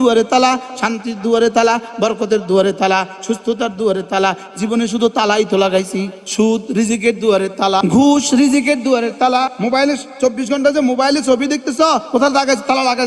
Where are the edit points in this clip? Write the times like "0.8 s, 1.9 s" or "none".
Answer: 6.2 s, 7.8 s, 9.5 s, 12.0 s